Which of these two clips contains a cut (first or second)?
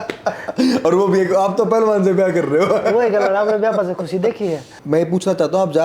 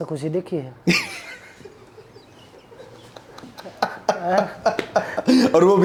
first